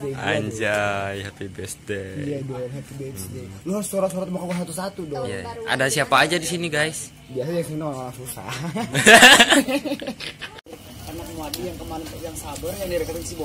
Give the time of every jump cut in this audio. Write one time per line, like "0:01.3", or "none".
0:10.6